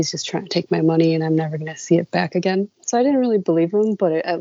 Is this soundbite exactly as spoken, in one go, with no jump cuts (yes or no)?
no